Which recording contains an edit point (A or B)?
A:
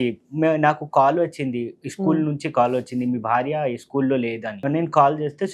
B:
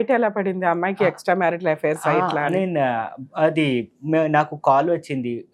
A